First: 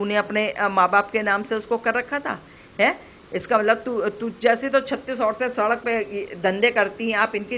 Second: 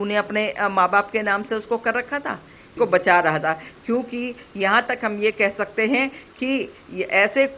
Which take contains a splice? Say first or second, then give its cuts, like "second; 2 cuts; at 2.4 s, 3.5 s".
second; 1 cut; at 2.6 s